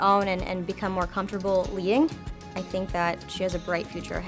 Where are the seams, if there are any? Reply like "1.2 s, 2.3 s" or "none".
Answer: 2.5 s